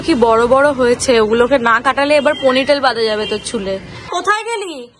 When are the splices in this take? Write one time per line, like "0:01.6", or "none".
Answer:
0:04.0